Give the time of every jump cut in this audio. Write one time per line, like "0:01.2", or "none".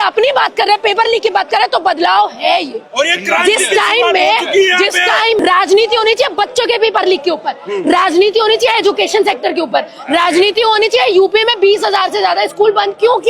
0:05.4